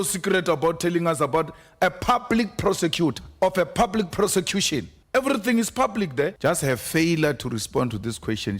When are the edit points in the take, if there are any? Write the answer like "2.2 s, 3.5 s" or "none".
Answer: 3.2 s, 5.0 s, 6.4 s

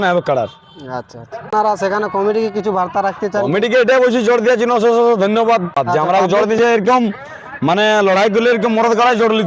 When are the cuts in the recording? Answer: 1.5 s, 5.8 s

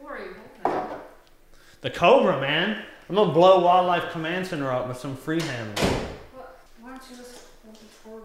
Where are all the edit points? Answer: 6.7 s

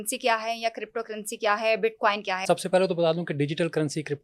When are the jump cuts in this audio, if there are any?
2.4 s

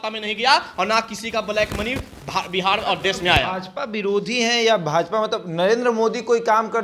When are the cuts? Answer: none

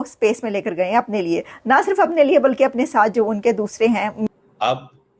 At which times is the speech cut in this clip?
4.2 s

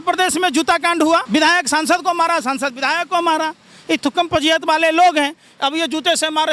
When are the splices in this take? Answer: 1.2 s

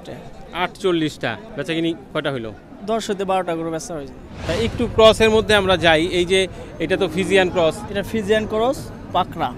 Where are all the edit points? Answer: 1.4 s, 4.4 s

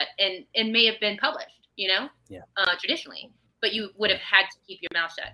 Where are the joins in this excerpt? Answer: 1.6 s

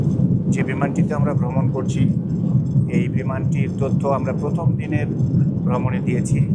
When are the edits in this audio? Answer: none

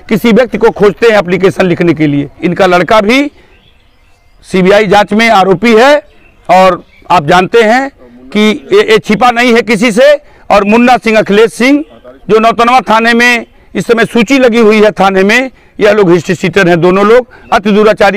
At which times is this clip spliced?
2.4 s

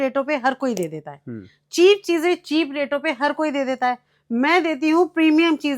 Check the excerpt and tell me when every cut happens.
none

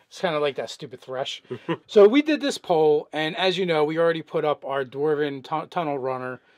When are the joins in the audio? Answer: 1.8 s

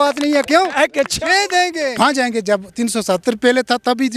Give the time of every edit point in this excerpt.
1.9 s

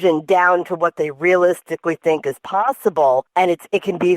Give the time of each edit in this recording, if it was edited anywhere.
3.3 s

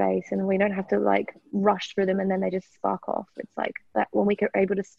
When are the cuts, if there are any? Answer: none

